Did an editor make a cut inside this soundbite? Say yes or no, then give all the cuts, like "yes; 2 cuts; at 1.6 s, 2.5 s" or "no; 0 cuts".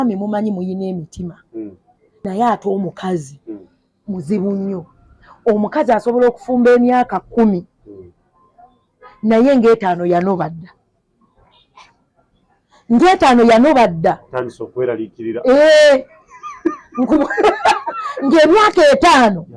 yes; 1 cut; at 2.2 s